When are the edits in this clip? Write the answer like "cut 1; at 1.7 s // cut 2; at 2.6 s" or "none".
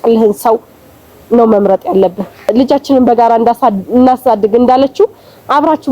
cut 1; at 2.5 s